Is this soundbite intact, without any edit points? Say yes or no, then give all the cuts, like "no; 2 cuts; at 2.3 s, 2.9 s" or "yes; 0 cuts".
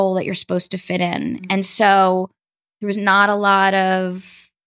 yes; 0 cuts